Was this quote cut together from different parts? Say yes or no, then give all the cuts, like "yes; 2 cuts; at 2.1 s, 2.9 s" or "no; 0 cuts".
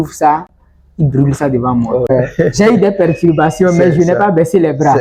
yes; 1 cut; at 2.1 s